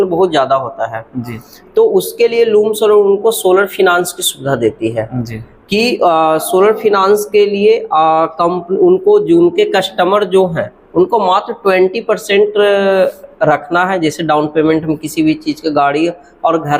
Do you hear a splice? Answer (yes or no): no